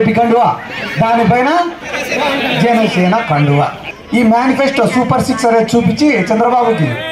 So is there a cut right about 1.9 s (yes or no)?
no